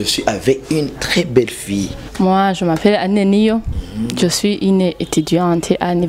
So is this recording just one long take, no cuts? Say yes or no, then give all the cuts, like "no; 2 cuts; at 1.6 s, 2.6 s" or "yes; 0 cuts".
no; 1 cut; at 2.0 s